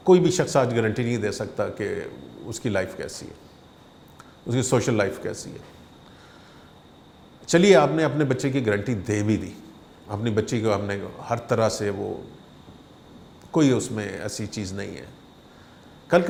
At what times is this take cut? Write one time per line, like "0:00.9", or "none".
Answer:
none